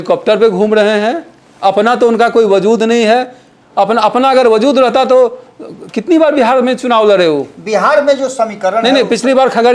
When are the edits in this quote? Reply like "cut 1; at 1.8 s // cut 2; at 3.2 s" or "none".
none